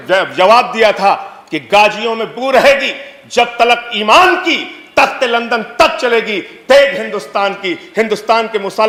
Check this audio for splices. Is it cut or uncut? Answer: uncut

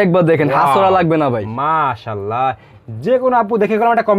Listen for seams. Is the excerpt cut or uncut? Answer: uncut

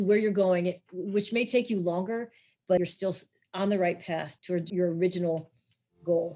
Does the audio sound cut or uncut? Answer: cut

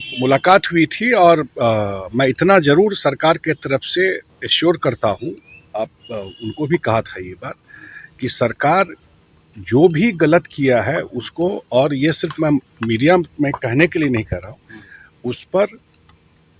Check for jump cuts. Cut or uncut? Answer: uncut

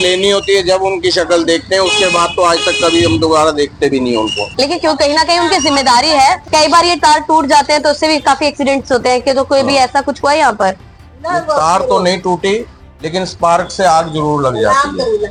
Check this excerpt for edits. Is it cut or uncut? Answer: uncut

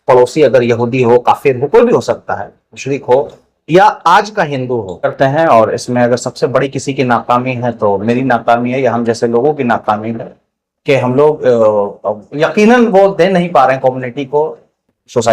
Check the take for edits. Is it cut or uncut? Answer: cut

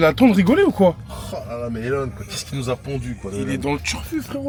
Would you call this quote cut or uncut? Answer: uncut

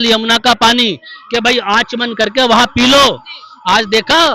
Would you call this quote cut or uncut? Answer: uncut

